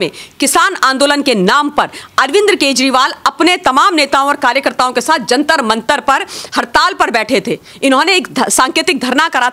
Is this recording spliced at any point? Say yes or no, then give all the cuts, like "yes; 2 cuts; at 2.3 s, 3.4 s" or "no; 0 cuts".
no; 0 cuts